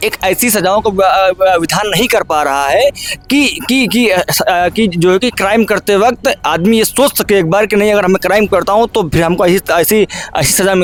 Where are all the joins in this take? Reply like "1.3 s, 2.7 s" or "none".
none